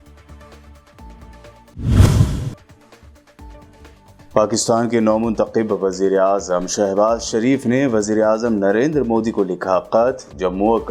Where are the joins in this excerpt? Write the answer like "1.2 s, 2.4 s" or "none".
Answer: 1.0 s